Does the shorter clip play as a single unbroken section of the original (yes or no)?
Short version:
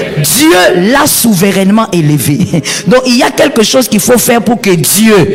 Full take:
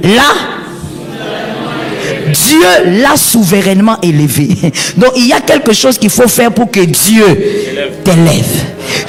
yes